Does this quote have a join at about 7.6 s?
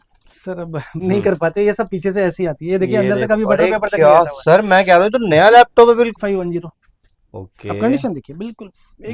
no; 2 cuts; at 0.9 s, 6.2 s

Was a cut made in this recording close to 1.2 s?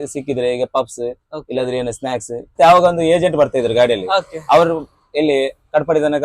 no; 1 cut; at 2.5 s

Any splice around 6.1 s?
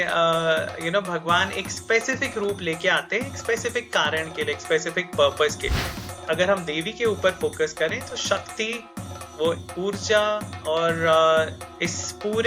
yes; 1 cut; at 6.1 s

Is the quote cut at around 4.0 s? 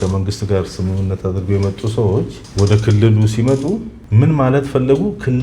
yes; 2 cuts; at 2.4 s, 4.0 s

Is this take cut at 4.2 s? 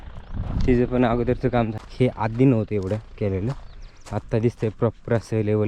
no; 1 cut; at 1.7 s

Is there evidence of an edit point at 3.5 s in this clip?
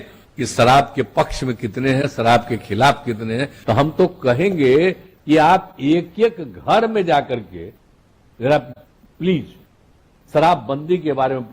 yes; 1 cut; at 3.5 s

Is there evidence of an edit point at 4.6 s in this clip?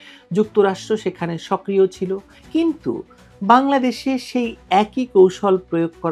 no; 1 cut; at 2.3 s

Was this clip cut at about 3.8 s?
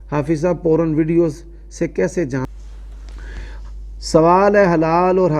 no; 1 cut; at 2.5 s

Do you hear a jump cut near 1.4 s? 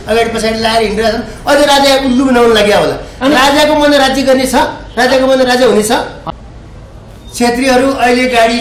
no; 1 cut; at 6.2 s

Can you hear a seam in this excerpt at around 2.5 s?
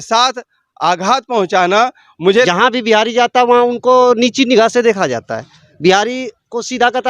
yes; 1 cut; at 2.5 s

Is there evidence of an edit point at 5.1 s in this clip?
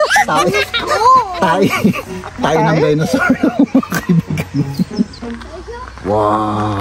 yes; 1 cut; at 5.1 s

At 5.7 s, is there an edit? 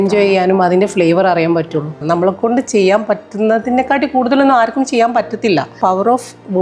yes; 2 cuts; at 2.0 s, 5.7 s

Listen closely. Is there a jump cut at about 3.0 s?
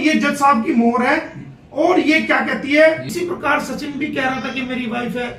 yes; 1 cut; at 3.0 s

